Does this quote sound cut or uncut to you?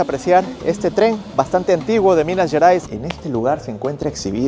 cut